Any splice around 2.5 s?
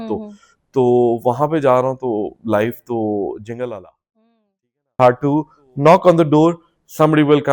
no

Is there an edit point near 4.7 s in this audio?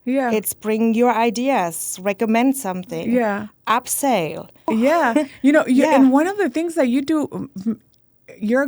yes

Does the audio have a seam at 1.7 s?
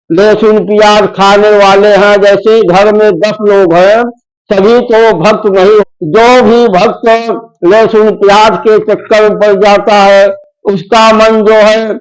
no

